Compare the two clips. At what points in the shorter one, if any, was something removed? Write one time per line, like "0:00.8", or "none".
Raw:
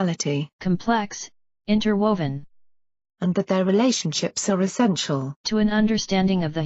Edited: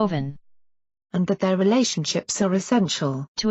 none